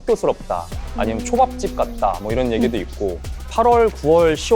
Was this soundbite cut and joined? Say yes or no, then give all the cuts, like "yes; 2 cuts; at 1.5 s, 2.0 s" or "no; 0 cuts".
yes; 1 cut; at 3.3 s